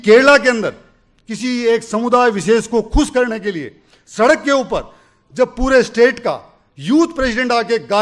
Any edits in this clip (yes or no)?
no